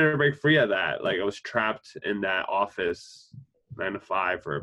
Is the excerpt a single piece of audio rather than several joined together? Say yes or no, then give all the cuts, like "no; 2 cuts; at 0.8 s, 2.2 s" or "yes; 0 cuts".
yes; 0 cuts